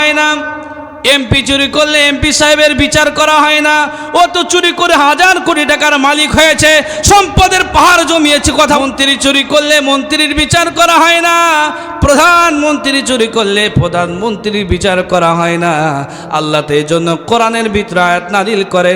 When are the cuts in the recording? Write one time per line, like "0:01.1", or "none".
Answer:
0:08.8